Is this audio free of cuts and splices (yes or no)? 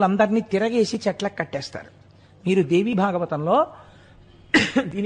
yes